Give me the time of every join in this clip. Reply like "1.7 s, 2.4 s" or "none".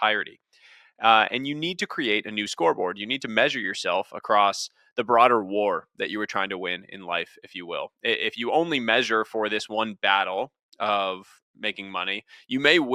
none